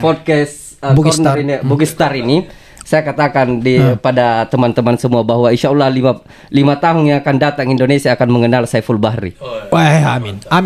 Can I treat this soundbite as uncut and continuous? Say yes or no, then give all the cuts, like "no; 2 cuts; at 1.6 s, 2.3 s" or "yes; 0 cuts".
yes; 0 cuts